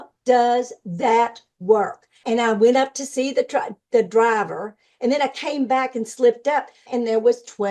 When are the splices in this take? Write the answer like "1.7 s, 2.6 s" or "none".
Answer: 2.2 s, 6.8 s